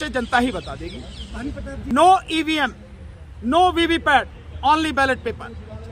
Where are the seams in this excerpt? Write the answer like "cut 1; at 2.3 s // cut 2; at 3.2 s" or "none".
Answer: cut 1; at 1.9 s

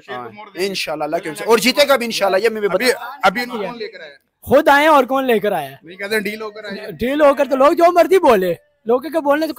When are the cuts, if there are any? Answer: cut 1; at 2.8 s

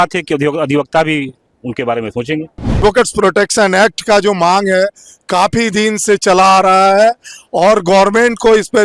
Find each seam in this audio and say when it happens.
cut 1; at 2.8 s

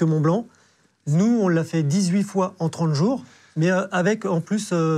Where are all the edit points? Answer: cut 1; at 3.4 s

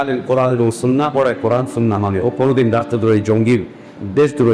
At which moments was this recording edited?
none

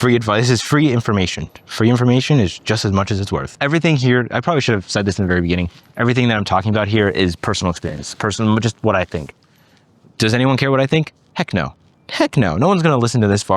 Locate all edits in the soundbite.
cut 1; at 3.5 s

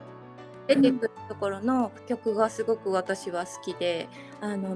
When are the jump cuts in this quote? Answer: cut 1; at 2.0 s

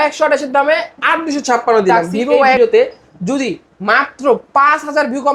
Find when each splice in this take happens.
cut 1; at 2.6 s

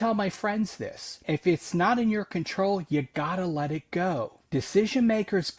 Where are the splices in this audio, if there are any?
cut 1; at 1.2 s // cut 2; at 4.4 s

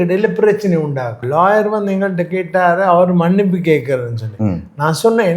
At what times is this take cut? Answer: cut 1; at 1.2 s

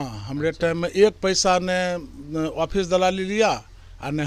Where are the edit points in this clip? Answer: none

